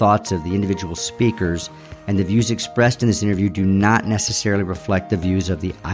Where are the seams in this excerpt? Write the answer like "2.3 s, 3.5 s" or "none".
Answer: none